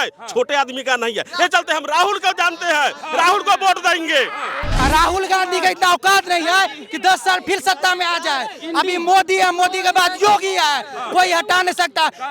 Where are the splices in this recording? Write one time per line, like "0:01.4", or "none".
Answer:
0:04.8